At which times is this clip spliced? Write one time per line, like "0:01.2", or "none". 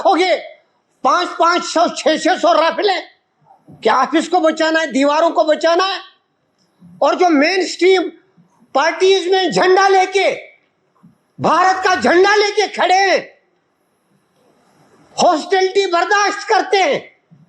none